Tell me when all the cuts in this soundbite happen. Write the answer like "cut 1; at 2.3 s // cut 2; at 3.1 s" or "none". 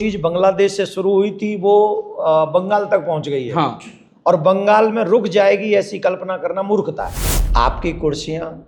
cut 1; at 7.1 s